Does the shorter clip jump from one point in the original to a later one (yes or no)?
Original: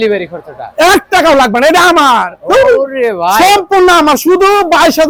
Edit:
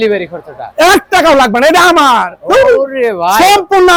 no